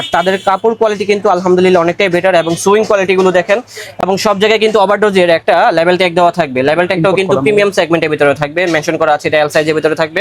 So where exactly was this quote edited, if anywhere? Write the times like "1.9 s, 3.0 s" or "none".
none